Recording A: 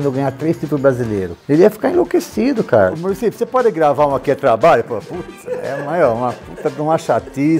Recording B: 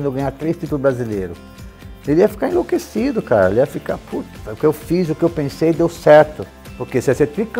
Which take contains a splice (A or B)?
A